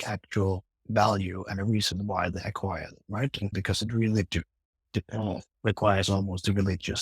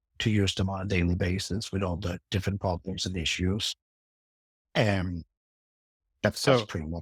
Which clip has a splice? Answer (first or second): first